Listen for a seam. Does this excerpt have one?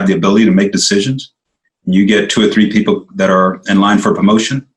no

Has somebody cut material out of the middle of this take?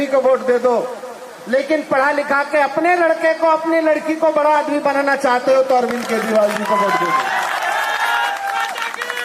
no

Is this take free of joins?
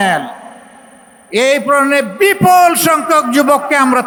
yes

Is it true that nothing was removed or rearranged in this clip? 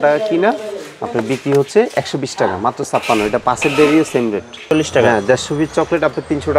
no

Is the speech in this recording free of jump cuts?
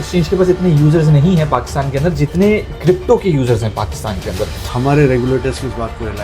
no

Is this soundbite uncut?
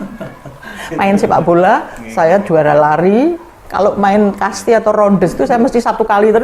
yes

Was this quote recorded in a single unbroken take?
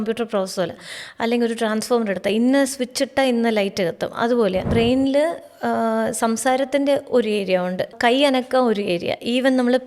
no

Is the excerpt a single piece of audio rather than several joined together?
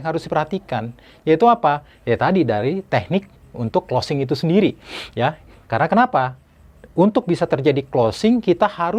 yes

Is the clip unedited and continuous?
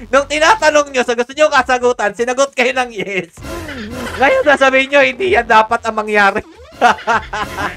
yes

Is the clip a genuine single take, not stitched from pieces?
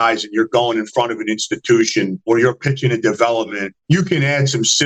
yes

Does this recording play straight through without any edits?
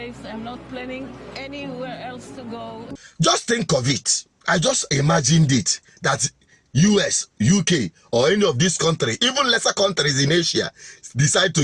no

